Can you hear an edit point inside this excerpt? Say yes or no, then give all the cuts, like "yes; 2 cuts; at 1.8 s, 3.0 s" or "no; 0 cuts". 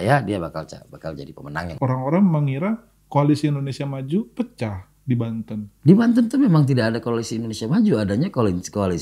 yes; 1 cut; at 1.7 s